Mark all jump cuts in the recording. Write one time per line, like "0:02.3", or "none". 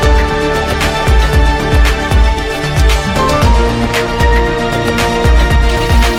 none